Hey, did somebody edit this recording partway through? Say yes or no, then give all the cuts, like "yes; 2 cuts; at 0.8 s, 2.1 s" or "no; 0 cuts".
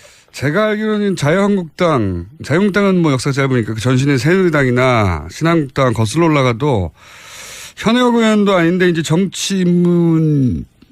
no; 0 cuts